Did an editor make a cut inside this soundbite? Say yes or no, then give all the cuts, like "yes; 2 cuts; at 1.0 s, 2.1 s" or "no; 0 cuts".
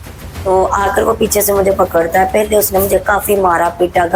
no; 0 cuts